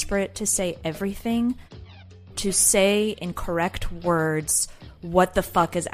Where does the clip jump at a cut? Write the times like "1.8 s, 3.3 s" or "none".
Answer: 1.8 s